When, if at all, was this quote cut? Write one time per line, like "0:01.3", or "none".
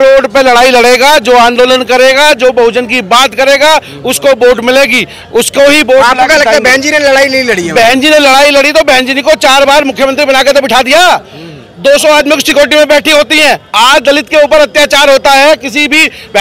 none